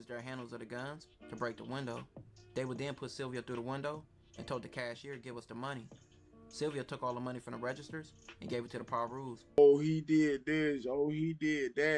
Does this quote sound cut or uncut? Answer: cut